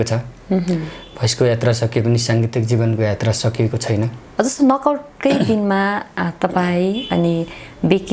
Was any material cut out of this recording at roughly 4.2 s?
no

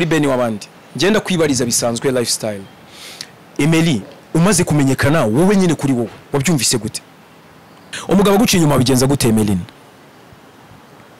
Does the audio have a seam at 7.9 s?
yes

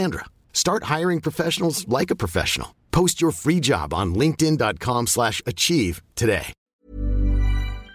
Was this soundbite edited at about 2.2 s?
no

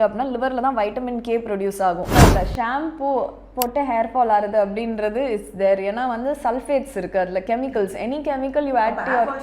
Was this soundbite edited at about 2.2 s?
yes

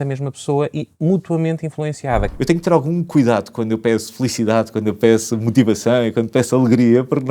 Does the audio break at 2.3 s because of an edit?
yes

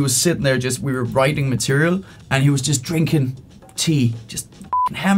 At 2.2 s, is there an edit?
yes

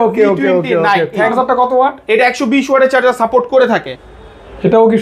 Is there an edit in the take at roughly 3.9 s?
yes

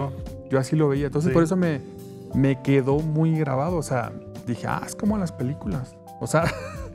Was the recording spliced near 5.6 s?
no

